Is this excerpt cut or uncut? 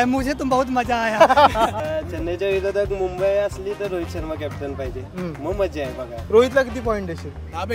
cut